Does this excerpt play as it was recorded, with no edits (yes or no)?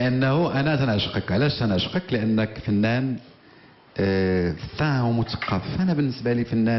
no